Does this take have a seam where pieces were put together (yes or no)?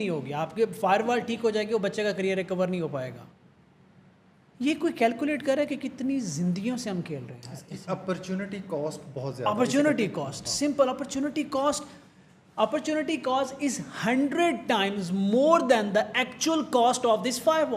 no